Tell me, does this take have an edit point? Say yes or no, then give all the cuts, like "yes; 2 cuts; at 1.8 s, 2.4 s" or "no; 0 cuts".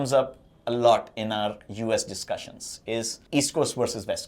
no; 0 cuts